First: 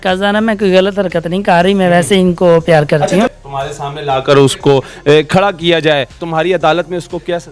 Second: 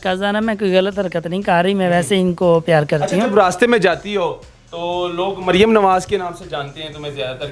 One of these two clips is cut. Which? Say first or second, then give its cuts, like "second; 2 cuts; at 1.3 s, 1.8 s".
first; 2 cuts; at 3.3 s, 6.2 s